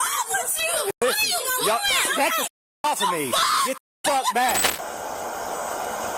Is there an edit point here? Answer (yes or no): yes